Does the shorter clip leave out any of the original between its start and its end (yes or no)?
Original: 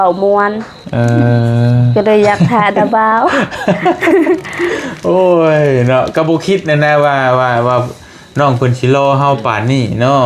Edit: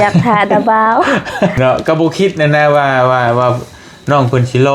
yes